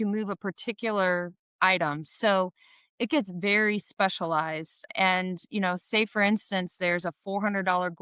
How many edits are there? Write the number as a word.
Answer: one